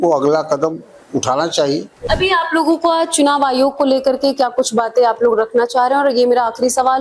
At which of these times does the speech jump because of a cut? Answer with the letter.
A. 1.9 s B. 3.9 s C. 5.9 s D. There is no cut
A